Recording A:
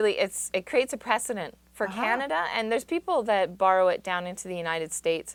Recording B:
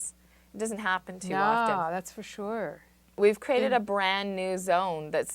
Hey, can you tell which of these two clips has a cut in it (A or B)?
B